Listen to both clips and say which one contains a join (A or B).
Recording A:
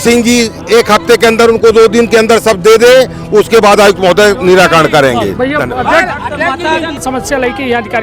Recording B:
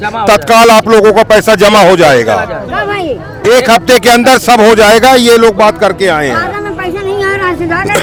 A